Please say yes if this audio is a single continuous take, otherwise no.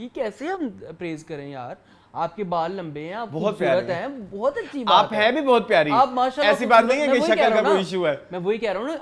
yes